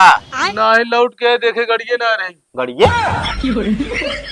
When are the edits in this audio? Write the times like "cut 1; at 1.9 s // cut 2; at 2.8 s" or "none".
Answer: cut 1; at 2.9 s